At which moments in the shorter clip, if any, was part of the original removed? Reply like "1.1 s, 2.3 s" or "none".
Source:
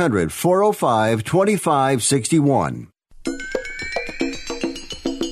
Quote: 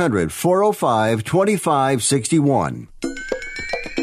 2.9 s